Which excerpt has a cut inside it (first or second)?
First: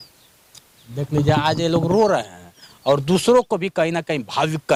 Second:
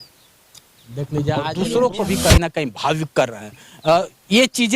second